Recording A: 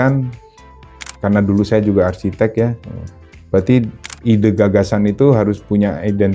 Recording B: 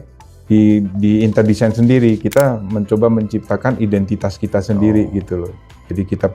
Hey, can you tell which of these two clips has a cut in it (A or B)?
A